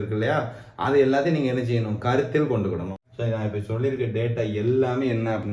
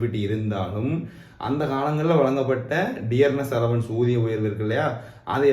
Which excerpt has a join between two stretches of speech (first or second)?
first